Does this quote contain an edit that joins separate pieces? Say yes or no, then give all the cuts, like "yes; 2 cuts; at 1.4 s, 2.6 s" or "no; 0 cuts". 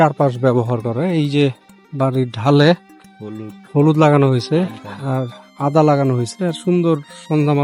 no; 0 cuts